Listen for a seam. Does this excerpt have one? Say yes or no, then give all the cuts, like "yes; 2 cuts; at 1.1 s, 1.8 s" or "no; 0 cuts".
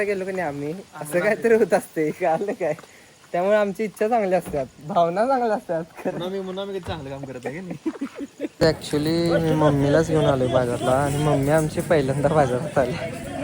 yes; 1 cut; at 8.5 s